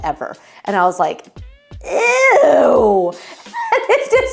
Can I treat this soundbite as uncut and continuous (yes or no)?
yes